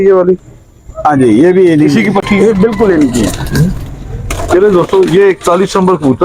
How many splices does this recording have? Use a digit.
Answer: 0